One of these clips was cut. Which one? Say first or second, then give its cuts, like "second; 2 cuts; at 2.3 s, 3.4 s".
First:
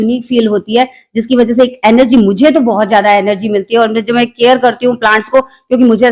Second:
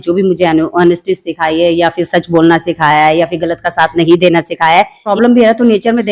second; 1 cut; at 5.1 s